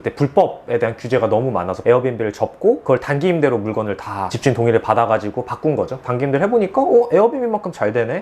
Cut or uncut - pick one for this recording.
uncut